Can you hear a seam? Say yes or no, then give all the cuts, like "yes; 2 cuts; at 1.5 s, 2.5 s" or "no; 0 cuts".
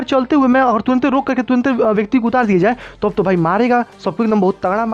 no; 0 cuts